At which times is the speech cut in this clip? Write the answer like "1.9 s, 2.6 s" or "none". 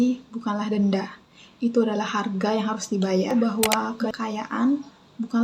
3.3 s

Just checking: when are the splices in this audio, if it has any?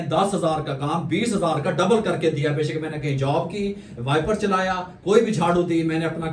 none

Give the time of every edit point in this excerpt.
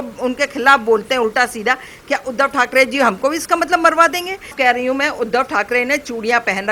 4.5 s

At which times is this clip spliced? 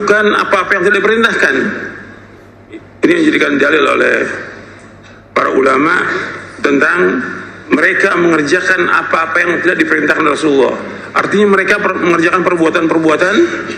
none

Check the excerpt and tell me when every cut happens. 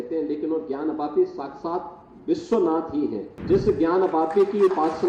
3.3 s

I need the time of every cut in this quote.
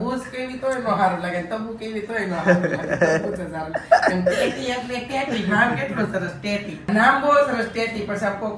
6.8 s

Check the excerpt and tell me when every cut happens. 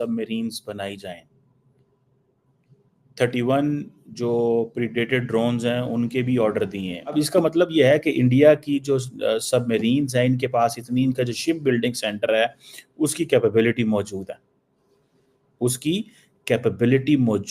7.1 s

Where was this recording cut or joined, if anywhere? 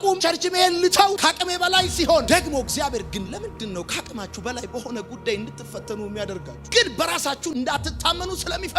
none

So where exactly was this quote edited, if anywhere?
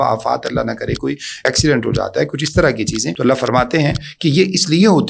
1.5 s, 3.1 s

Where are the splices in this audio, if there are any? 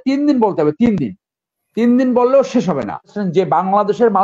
3.1 s

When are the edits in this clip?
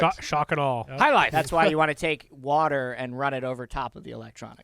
0.9 s

